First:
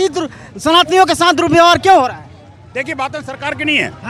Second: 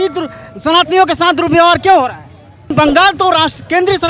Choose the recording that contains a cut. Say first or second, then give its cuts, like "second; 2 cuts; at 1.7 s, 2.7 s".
second; 1 cut; at 2.7 s